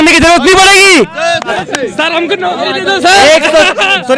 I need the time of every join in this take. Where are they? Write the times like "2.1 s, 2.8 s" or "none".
none